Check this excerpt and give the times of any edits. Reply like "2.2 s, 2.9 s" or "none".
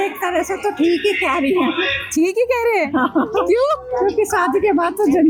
none